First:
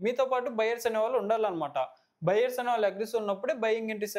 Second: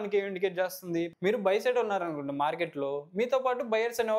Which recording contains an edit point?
second; 1 cut; at 1.1 s

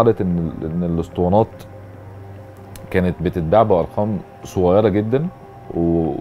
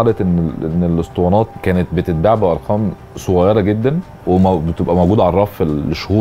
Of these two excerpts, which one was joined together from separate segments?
second; 2 cuts; at 1.6 s, 4.1 s

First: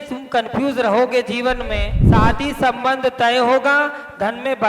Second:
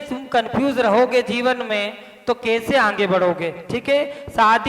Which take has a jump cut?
first; 1 cut; at 2.0 s

